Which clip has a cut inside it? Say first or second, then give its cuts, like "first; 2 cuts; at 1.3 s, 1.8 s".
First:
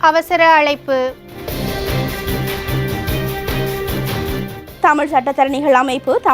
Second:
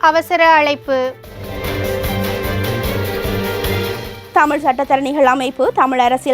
first; 2 cuts; at 1.5 s, 4.6 s